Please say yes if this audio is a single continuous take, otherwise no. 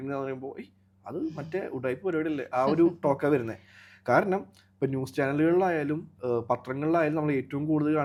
yes